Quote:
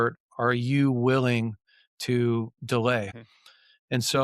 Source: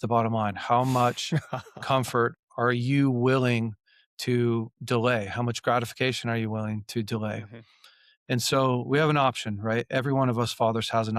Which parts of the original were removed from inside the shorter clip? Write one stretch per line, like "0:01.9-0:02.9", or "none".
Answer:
0:05.3-0:07.5